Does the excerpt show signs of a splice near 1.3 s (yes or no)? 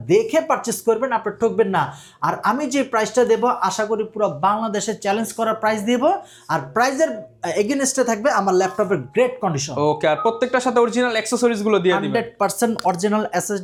no